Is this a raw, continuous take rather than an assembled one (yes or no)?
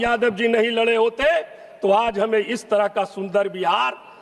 yes